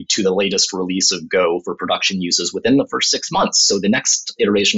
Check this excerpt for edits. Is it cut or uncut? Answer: uncut